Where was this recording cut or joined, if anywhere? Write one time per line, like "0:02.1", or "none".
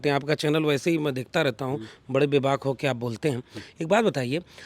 none